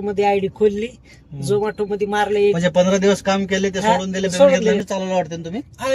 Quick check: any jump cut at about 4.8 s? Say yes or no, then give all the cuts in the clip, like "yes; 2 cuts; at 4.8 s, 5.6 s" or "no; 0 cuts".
yes; 1 cut; at 4.8 s